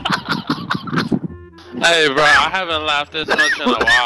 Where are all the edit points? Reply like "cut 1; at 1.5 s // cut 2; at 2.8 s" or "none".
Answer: cut 1; at 1.6 s